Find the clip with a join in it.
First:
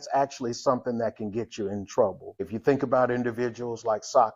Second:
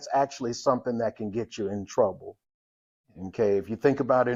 first; 1 cut; at 2.5 s

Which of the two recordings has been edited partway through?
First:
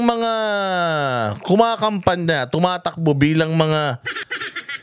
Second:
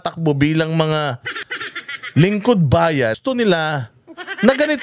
second; 1 cut; at 3.2 s

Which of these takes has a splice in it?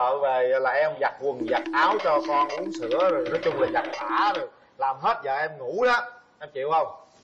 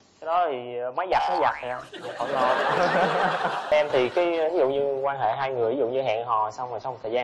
second; 1 cut; at 3.7 s

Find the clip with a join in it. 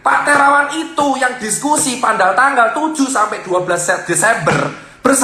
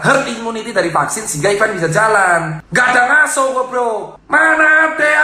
second; 2 cuts; at 2.6 s, 4.1 s

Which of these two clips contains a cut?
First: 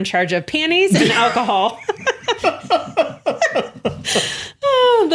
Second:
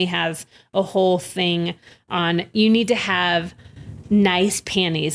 first; 1 cut; at 2.4 s

